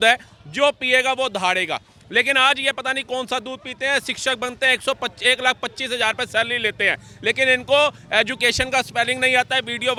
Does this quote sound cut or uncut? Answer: uncut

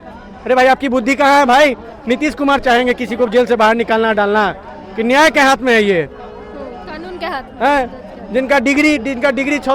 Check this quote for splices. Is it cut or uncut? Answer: uncut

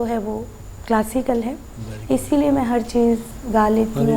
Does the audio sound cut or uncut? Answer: uncut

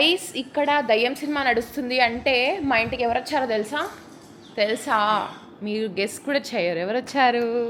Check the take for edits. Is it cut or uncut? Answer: uncut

